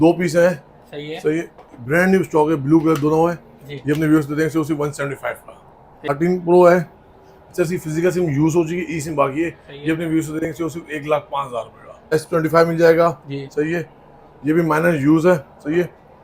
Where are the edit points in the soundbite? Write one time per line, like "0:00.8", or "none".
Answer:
0:06.1
0:12.0